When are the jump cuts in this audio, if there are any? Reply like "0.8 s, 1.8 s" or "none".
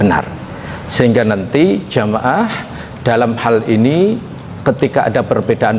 none